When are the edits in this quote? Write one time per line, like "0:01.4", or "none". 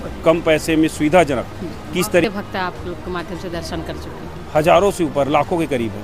0:02.2